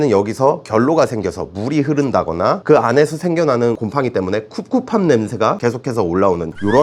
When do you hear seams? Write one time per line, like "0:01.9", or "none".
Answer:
none